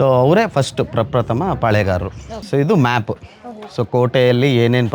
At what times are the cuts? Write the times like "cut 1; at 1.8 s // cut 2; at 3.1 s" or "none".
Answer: cut 1; at 2.3 s